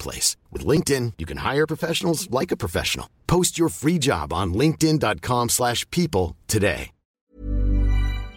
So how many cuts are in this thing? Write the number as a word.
one